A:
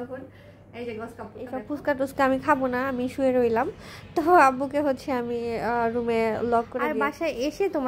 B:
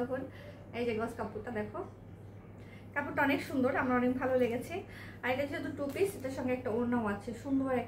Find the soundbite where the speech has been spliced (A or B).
A